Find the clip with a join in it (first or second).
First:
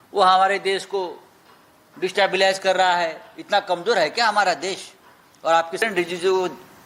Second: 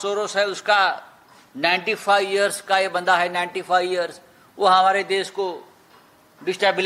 first